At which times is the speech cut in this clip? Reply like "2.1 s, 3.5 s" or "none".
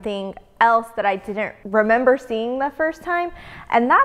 1.6 s